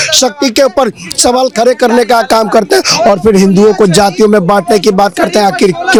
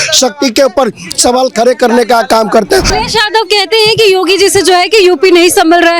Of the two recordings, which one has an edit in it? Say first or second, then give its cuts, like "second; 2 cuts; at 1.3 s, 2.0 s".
second; 1 cut; at 2.9 s